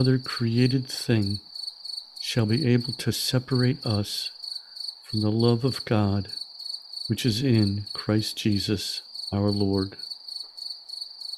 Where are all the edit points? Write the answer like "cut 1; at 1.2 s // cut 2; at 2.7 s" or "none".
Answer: none